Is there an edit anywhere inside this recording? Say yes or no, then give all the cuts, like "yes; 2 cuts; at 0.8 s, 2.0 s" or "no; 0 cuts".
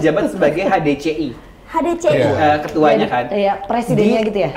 no; 0 cuts